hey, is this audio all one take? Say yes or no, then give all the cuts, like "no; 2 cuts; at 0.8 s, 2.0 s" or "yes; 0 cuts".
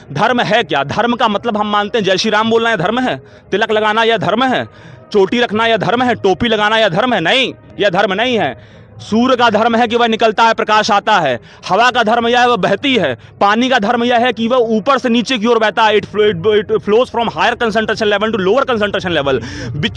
yes; 0 cuts